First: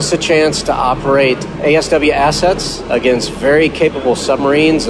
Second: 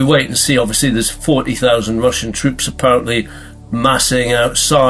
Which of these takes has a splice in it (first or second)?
first